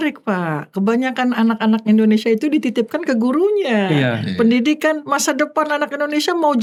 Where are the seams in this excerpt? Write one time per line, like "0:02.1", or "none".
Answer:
none